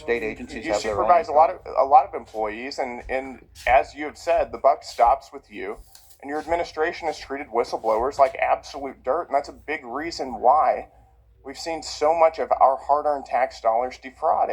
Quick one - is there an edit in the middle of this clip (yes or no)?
no